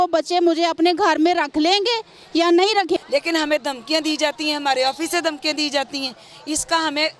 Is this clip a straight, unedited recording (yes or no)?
no